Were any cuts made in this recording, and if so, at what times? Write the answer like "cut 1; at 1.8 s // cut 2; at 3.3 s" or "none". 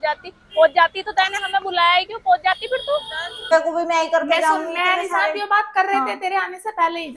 cut 1; at 3.5 s